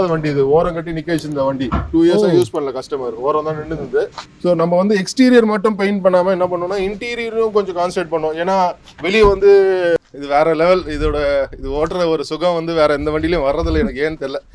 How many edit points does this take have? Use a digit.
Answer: 2